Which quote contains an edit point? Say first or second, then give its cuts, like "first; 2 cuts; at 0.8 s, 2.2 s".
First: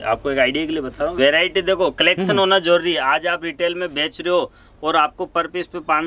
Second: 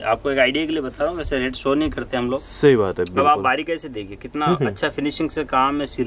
first; 1 cut; at 1.1 s